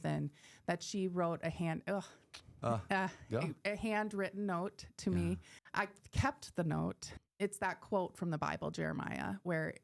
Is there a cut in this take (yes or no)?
yes